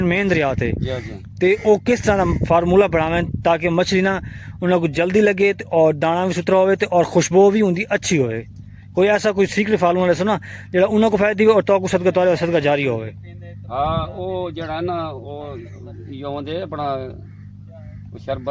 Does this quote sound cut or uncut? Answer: uncut